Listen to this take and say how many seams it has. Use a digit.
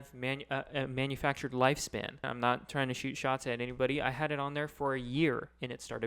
1